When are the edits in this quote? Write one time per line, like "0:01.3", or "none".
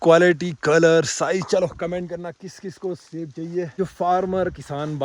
0:03.7